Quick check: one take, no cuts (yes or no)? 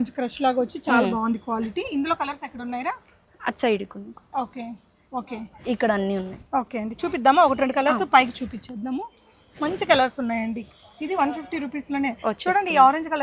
yes